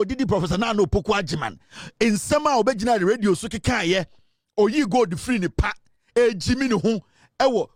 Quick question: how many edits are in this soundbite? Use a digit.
0